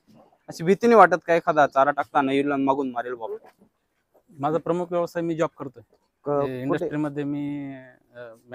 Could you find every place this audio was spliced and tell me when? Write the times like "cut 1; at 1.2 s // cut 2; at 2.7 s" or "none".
cut 1; at 3.1 s